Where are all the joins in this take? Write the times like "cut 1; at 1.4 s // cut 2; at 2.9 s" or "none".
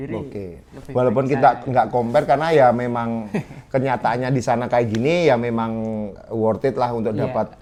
none